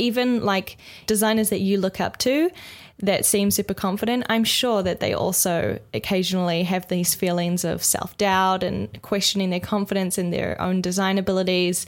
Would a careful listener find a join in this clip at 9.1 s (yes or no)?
no